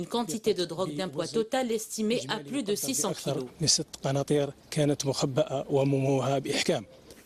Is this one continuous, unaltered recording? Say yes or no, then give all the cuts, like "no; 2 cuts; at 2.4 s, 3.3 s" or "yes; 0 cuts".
no; 1 cut; at 4.6 s